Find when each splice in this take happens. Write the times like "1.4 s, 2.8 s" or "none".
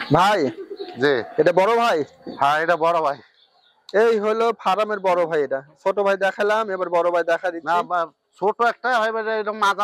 none